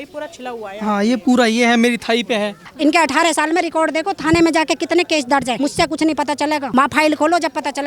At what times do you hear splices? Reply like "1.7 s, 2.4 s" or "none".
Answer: 2.6 s, 5.6 s, 6.6 s